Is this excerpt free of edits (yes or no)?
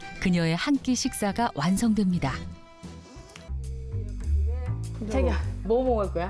no